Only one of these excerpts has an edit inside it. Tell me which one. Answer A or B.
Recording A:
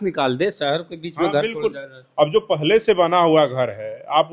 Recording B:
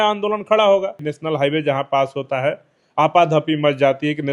B